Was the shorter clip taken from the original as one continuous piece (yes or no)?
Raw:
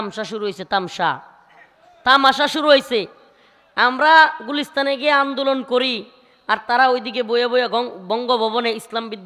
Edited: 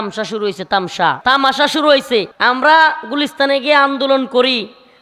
no